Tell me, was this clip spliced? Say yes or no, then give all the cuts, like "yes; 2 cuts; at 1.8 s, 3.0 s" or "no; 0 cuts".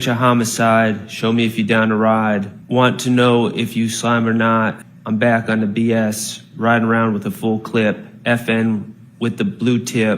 yes; 2 cuts; at 2.6 s, 4.9 s